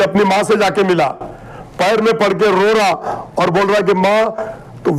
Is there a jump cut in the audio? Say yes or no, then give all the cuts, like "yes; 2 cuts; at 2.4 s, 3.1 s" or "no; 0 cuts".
no; 0 cuts